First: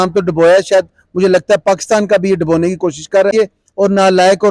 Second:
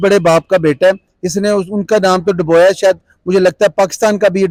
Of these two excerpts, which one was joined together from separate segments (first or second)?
first